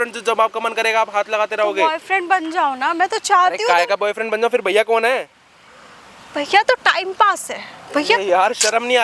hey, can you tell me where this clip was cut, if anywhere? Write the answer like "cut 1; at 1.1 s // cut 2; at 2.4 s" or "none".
none